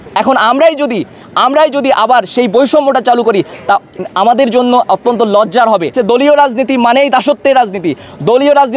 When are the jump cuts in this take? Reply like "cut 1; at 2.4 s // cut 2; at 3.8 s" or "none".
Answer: cut 1; at 5.9 s

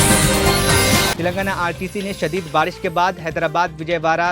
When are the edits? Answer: cut 1; at 1.1 s

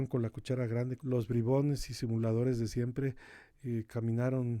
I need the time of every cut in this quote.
cut 1; at 1.0 s

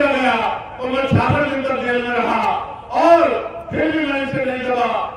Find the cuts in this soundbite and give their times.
none

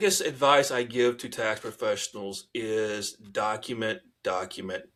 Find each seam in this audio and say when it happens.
none

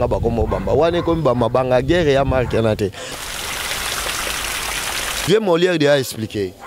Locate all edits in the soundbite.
cut 1; at 3.1 s // cut 2; at 5.1 s

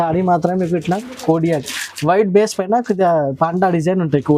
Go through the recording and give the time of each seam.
none

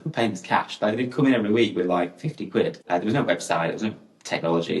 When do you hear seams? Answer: cut 1; at 2.8 s

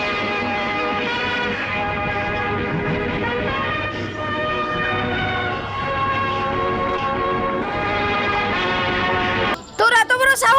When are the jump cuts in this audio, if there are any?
cut 1; at 9.5 s

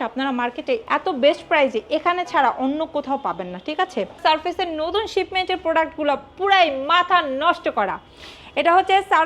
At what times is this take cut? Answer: cut 1; at 0.8 s // cut 2; at 4.2 s

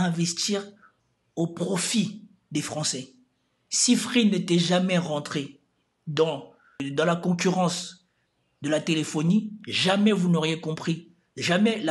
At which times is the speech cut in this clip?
none

